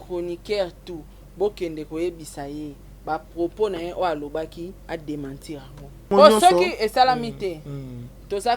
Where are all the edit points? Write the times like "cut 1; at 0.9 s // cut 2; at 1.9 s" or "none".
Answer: cut 1; at 6.1 s